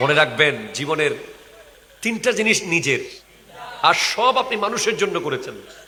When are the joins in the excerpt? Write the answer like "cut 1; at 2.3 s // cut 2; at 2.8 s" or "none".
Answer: none